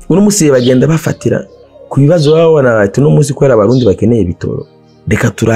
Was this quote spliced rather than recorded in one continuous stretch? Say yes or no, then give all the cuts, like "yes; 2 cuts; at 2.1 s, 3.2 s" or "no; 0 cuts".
no; 0 cuts